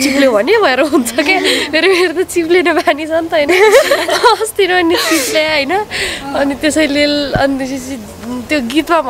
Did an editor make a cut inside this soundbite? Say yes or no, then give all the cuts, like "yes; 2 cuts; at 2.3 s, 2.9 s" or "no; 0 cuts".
no; 0 cuts